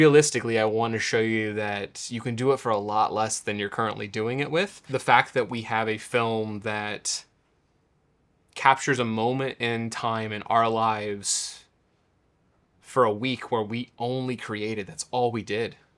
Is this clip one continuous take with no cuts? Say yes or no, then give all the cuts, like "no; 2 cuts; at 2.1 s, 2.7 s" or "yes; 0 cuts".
no; 1 cut; at 4.8 s